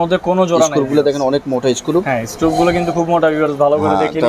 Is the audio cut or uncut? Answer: uncut